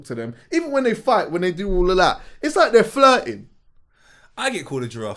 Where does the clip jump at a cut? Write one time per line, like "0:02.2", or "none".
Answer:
none